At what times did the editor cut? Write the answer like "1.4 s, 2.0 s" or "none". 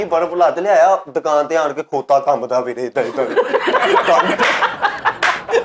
none